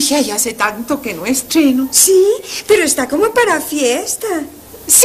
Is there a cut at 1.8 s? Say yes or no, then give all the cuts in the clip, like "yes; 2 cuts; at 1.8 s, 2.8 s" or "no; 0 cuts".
yes; 1 cut; at 1.8 s